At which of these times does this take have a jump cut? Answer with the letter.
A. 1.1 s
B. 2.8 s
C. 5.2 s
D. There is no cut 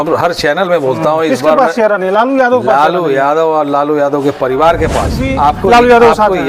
C